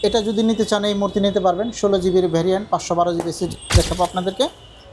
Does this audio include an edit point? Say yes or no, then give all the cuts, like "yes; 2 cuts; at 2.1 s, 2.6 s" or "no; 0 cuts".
yes; 1 cut; at 3.7 s